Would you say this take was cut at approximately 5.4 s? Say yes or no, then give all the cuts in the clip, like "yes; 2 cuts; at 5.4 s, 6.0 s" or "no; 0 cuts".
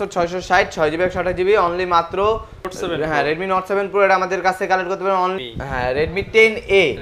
yes; 2 cuts; at 2.6 s, 5.4 s